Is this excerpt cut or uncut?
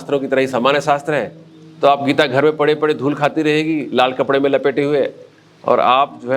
uncut